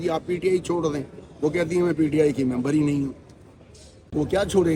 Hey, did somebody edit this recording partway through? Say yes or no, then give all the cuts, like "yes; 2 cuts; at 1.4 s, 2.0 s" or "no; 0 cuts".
no; 0 cuts